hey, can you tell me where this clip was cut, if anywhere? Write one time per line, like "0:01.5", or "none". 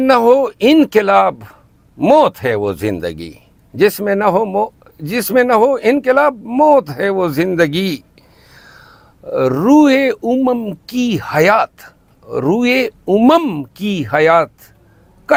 none